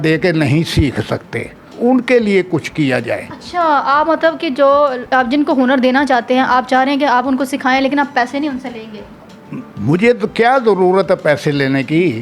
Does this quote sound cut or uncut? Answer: uncut